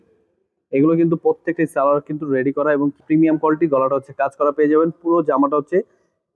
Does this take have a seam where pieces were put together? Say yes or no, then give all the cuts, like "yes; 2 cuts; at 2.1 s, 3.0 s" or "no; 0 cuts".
yes; 1 cut; at 3.0 s